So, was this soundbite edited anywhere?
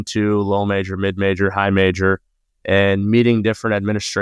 no; 0 cuts

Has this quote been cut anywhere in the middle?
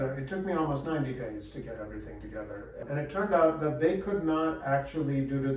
yes; 1 cut; at 2.8 s

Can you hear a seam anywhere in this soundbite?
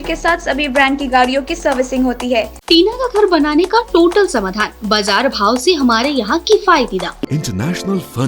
yes; 2 cuts; at 2.6 s, 7.3 s

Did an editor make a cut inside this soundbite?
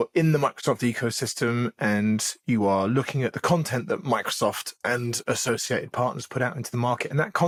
no; 0 cuts

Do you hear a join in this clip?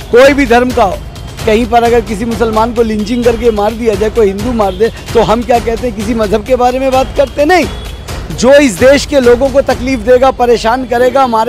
no; 0 cuts

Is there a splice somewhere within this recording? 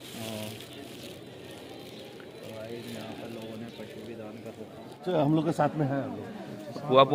no; 0 cuts

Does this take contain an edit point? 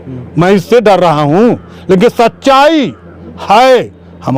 no; 0 cuts

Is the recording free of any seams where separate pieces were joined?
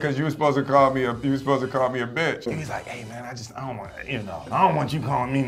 yes; 0 cuts

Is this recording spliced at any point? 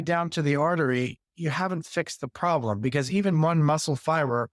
no; 0 cuts

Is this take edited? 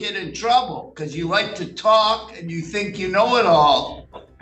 no; 0 cuts

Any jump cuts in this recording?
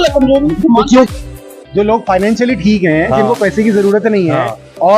yes; 1 cut; at 1.1 s

